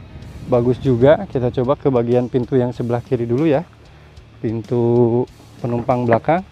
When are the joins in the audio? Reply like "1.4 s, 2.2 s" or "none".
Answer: none